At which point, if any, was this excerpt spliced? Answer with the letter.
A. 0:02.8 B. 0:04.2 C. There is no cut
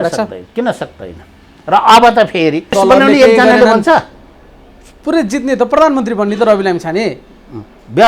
A